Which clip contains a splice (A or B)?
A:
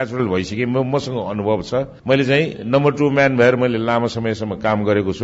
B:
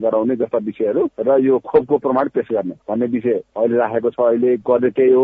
B